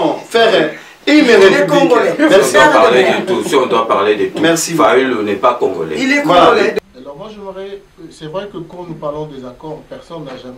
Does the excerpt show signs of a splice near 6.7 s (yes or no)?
yes